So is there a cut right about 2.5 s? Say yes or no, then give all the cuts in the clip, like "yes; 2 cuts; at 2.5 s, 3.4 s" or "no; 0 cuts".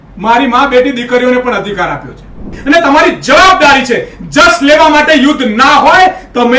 yes; 1 cut; at 2.5 s